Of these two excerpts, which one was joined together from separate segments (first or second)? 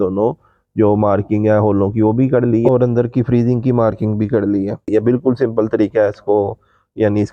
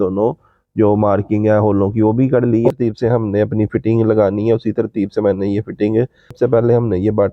second